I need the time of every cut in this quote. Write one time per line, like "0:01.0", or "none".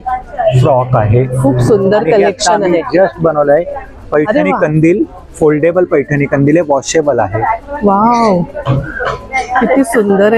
none